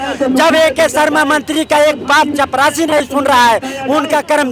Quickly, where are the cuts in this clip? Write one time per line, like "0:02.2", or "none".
none